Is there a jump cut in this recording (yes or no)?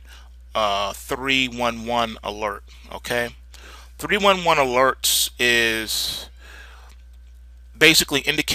no